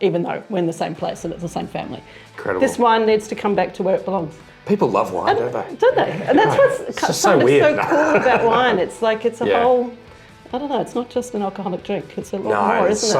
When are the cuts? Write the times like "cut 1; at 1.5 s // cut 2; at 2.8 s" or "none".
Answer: cut 1; at 2.3 s